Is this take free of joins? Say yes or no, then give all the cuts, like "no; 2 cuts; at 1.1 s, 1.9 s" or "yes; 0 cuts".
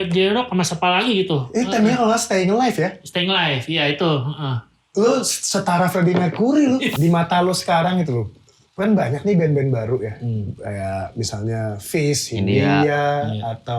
no; 1 cut; at 6.9 s